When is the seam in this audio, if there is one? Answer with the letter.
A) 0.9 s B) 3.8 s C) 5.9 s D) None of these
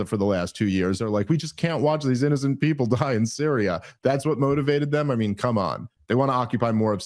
C